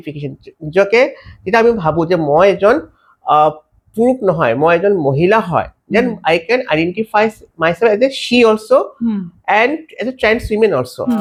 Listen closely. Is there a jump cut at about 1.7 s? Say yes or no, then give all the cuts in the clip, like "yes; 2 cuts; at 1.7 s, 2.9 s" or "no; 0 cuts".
no; 0 cuts